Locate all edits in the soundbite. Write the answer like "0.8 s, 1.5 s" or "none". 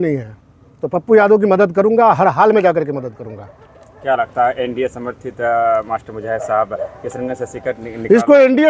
none